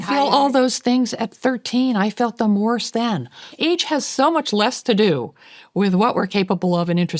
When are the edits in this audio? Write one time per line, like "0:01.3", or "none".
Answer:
0:03.5